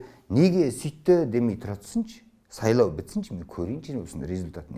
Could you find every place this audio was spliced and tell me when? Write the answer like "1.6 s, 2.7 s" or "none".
none